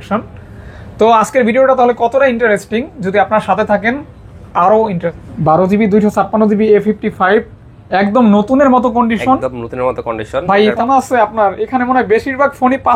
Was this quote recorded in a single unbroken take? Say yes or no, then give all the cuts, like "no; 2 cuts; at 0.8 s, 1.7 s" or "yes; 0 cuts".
no; 2 cuts; at 5.2 s, 10.8 s